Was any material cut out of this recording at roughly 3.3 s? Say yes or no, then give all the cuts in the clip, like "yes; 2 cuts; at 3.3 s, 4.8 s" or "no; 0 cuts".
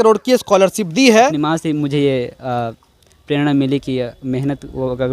no; 1 cut; at 1.3 s